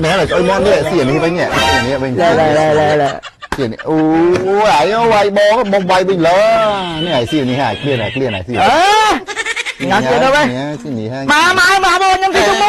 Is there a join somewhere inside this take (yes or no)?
no